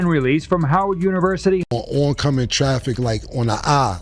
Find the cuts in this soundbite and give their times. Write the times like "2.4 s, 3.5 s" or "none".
1.6 s

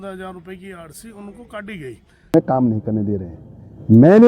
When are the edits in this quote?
2.3 s

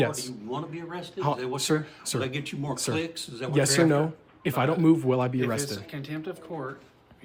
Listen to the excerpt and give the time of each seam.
none

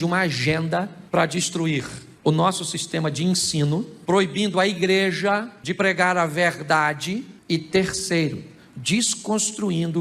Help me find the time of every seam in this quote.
1.0 s, 2.0 s, 3.9 s, 5.6 s, 7.3 s

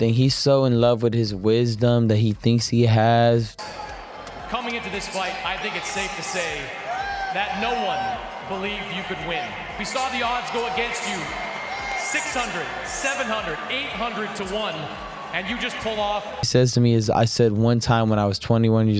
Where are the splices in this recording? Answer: none

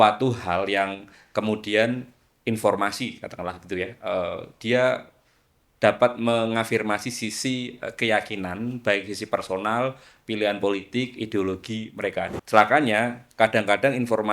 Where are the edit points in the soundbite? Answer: 12.4 s

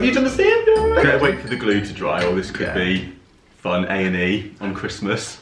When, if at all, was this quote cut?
1.0 s

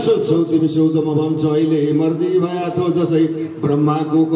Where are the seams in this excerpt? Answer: none

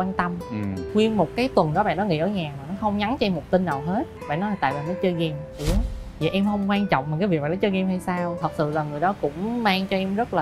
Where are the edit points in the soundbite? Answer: 0.8 s, 4.1 s, 8.3 s

